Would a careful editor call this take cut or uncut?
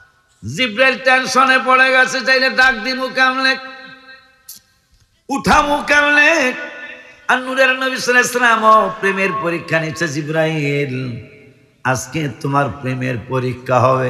uncut